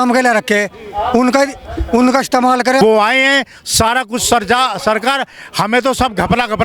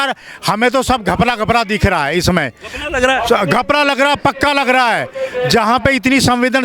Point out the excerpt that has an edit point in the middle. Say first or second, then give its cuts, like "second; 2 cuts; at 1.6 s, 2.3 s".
first; 1 cut; at 2.8 s